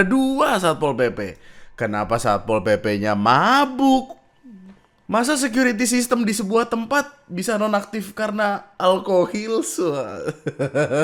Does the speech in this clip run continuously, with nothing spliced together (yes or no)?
yes